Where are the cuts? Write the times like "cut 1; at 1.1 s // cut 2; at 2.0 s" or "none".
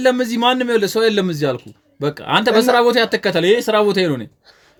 none

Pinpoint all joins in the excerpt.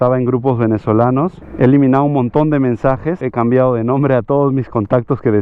cut 1; at 1.4 s // cut 2; at 3.2 s

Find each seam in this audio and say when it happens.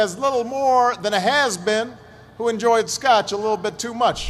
none

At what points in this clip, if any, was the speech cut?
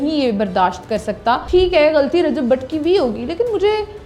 cut 1; at 1.4 s

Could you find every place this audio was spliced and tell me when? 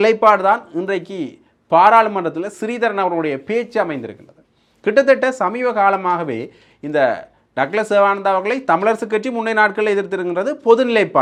none

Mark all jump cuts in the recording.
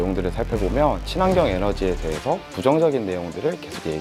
none

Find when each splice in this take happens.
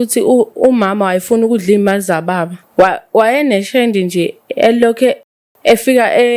cut 1; at 2.6 s

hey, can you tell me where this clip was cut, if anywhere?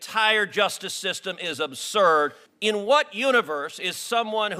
cut 1; at 2.4 s

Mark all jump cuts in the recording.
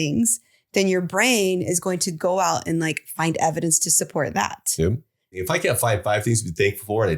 cut 1; at 5.3 s

